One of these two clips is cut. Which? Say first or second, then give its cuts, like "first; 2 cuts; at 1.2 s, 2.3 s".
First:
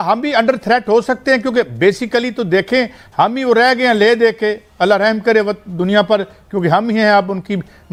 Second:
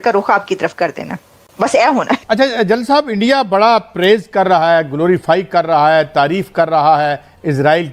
second; 1 cut; at 2.2 s